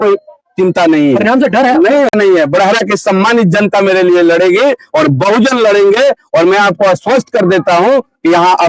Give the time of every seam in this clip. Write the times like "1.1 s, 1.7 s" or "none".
2.1 s